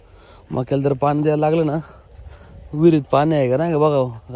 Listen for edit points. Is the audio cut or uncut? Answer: uncut